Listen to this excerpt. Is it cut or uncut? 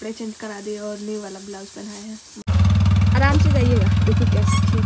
cut